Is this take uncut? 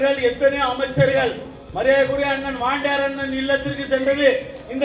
yes; 0 cuts

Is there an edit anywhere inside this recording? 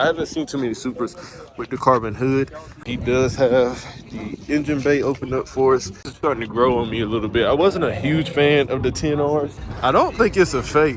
yes; 3 cuts; at 2.8 s, 6.1 s, 9.6 s

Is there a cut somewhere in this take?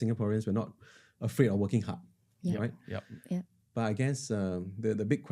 no; 0 cuts

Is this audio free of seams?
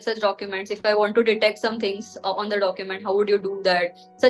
yes; 0 cuts

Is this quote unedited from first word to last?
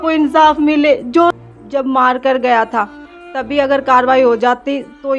no; 1 cut; at 1.3 s

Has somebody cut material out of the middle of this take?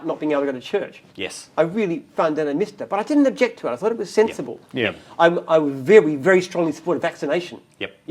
no; 0 cuts

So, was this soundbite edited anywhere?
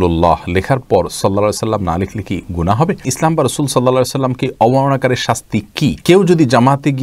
yes; 2 cuts; at 3.1 s, 6.0 s

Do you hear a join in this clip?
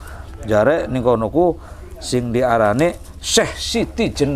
no; 0 cuts

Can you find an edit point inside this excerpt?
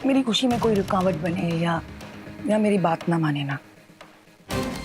no; 0 cuts

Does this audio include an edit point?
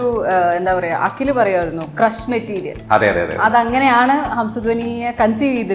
no; 0 cuts

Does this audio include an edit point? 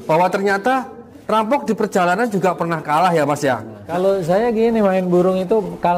yes; 1 cut; at 3.8 s

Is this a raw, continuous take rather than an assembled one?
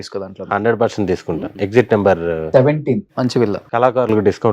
no; 2 cuts; at 1.5 s, 3.6 s

